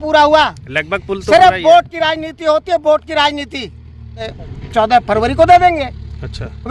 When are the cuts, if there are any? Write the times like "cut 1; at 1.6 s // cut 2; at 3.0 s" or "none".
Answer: cut 1; at 4.4 s